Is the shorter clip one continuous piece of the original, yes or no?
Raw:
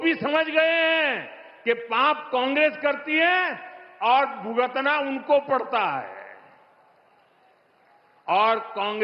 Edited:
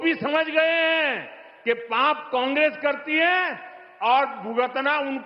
yes